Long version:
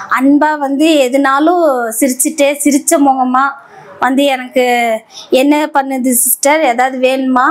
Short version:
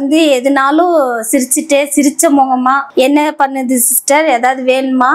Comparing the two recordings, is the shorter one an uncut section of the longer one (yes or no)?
no